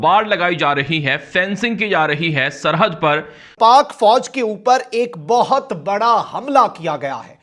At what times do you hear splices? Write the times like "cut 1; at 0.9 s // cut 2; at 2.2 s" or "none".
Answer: cut 1; at 3.5 s